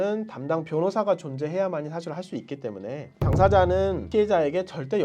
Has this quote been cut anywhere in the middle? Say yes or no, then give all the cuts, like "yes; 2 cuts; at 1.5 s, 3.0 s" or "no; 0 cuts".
no; 0 cuts